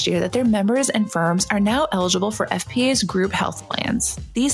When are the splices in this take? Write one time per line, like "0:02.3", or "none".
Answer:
none